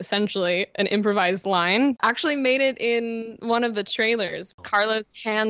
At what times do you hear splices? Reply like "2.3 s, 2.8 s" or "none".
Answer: 2.0 s, 4.5 s